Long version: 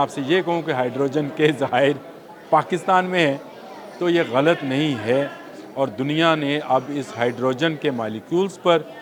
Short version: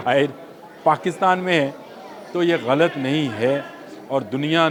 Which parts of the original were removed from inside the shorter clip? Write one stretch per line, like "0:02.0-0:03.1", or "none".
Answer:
none